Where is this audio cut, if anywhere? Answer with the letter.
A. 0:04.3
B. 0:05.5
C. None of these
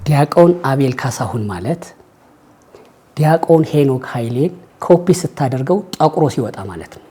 C